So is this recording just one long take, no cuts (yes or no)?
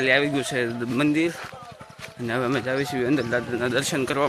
yes